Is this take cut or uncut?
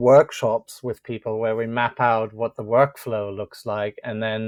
uncut